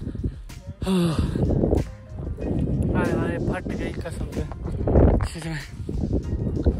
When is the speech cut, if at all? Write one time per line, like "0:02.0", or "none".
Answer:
none

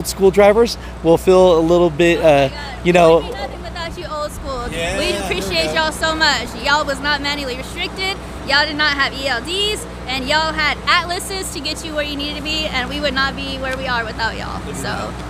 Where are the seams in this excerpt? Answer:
none

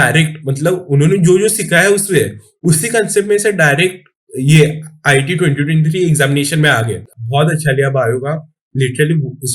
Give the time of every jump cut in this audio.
0:07.1

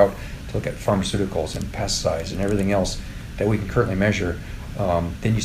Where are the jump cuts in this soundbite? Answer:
none

